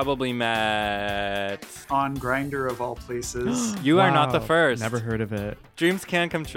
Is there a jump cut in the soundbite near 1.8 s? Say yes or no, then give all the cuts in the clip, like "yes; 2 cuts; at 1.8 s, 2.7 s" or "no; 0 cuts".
yes; 2 cuts; at 1.8 s, 5.6 s